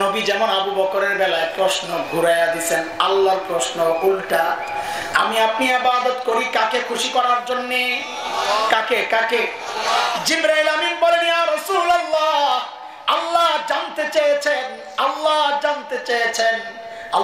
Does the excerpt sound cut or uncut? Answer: uncut